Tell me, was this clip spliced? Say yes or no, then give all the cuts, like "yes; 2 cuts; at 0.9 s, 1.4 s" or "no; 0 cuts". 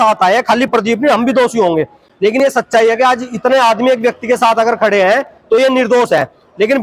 no; 0 cuts